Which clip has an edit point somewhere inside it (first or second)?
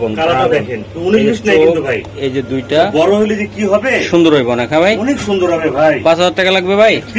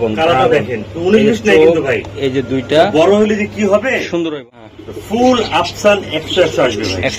second